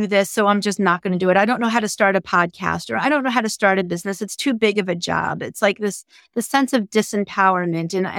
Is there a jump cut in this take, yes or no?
no